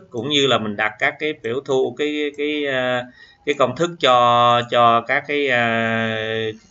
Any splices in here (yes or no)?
no